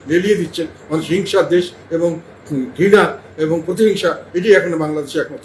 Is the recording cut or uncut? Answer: uncut